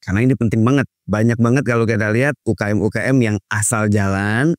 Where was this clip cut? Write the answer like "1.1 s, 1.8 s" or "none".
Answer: 1.0 s